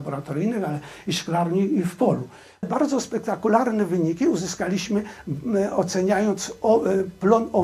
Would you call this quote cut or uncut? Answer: cut